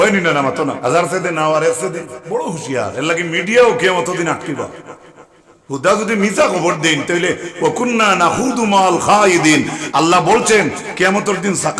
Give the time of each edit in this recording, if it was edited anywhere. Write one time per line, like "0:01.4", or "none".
0:00.8
0:02.2